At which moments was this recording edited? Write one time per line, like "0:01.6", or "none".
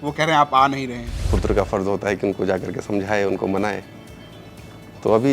0:01.1